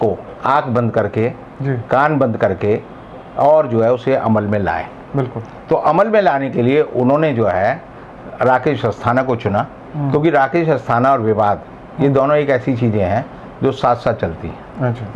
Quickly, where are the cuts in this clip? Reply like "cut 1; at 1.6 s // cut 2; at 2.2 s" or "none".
none